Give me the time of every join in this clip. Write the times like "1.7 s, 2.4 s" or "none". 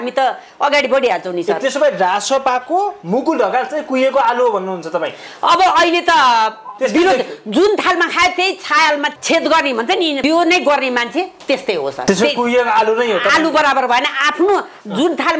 9.2 s, 10.2 s, 12.0 s

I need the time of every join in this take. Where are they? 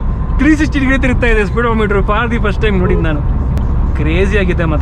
3.6 s

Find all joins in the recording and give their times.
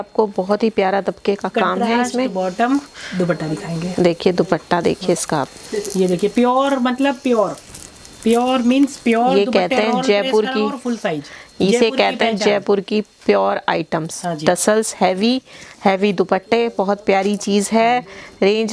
none

